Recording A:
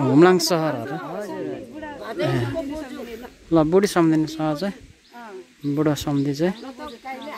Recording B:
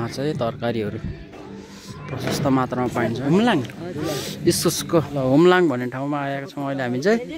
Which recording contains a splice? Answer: B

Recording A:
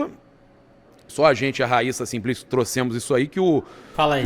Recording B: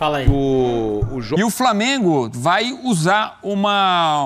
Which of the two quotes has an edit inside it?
B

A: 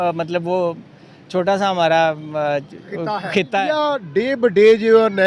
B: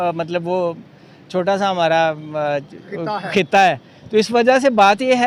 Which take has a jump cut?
A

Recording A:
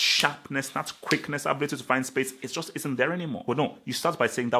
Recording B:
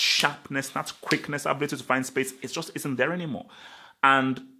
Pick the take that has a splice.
A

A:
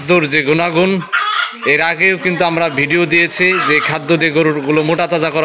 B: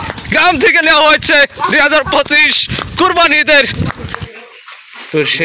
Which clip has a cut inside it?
B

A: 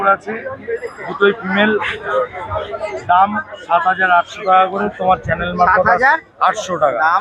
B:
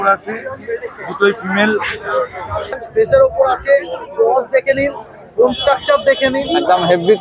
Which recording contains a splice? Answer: B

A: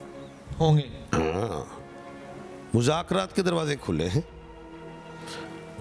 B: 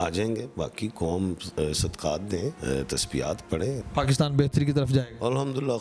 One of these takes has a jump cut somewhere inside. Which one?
B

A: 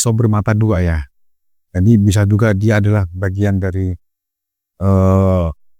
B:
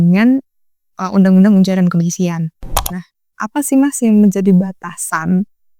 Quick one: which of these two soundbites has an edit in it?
B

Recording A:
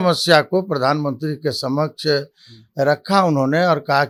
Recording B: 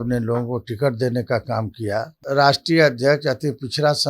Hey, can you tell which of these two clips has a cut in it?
B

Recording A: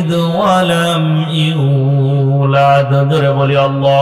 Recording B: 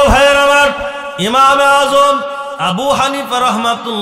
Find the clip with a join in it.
B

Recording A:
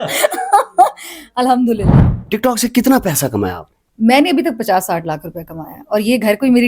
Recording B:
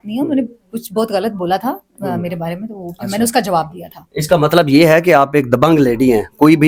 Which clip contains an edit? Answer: A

